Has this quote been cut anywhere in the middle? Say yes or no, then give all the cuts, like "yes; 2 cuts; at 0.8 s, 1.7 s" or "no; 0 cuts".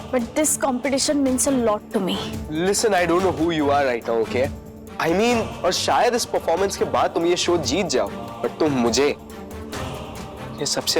yes; 2 cuts; at 5.5 s, 8.2 s